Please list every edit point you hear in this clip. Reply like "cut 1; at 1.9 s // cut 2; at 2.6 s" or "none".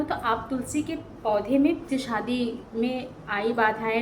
cut 1; at 1.8 s